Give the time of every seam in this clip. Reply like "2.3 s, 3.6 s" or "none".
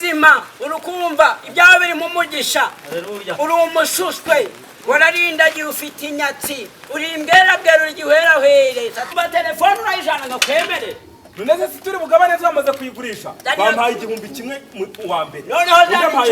9.0 s